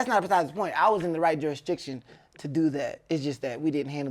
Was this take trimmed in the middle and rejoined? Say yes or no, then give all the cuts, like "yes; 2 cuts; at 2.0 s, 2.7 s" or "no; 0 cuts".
no; 0 cuts